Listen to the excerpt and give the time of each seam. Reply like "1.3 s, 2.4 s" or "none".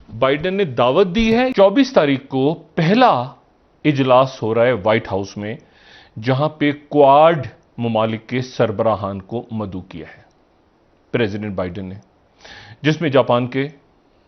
1.4 s